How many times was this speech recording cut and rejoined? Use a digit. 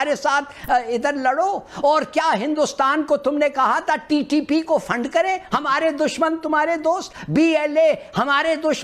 0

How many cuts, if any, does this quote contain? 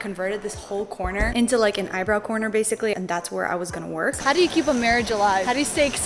2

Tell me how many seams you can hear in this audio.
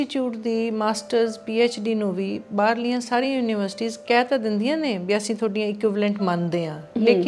0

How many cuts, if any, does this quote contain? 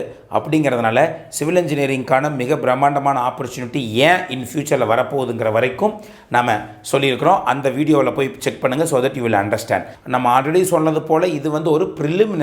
1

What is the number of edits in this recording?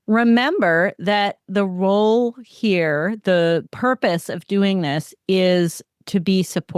1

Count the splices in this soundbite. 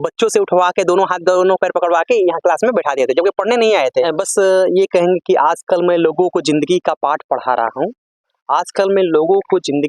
1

